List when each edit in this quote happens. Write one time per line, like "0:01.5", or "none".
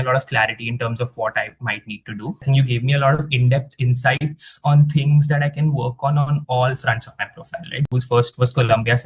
0:02.4
0:07.9